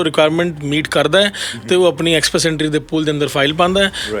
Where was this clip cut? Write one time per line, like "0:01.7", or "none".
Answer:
none